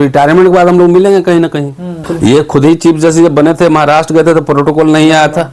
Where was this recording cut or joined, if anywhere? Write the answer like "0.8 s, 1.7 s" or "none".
2.1 s